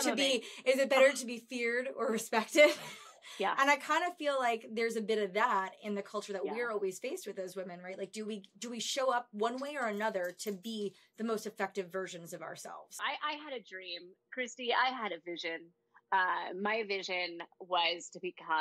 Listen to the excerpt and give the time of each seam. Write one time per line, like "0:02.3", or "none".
0:12.9

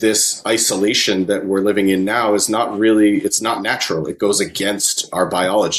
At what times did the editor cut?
none

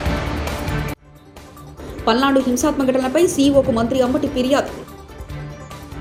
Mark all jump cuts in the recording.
none

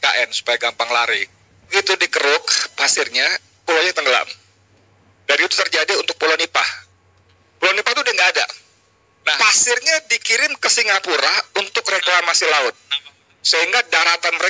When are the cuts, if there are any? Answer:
0:01.7
0:09.3

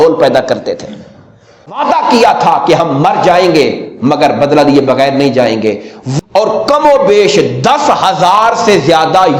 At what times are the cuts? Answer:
0:01.7
0:06.1

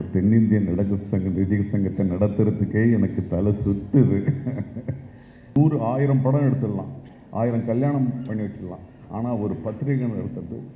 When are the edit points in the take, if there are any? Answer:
0:05.6

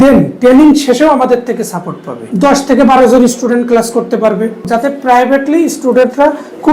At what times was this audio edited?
0:02.2
0:04.7

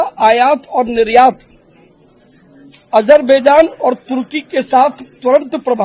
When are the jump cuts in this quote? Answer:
none

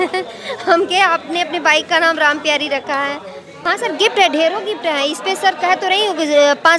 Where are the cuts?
0:03.5

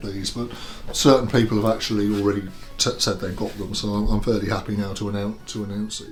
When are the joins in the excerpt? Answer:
none

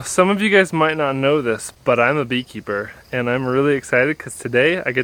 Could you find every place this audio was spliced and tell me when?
none

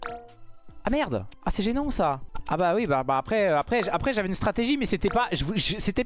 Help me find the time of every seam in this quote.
0:01.3
0:02.3

